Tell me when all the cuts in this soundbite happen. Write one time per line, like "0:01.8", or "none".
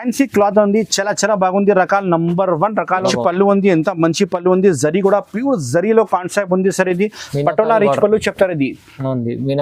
0:03.1